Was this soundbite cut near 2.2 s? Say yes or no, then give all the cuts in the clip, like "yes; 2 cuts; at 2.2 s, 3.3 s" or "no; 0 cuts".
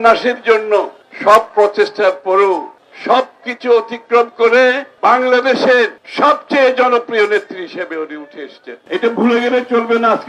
no; 1 cut; at 8.8 s